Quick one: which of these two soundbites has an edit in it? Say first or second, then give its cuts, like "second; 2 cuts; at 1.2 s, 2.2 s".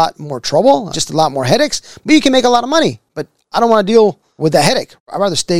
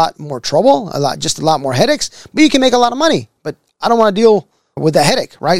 first; 2 cuts; at 0.9 s, 4.5 s